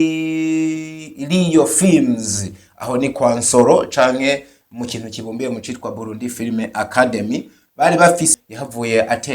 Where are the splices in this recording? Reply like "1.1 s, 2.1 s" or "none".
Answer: 8.3 s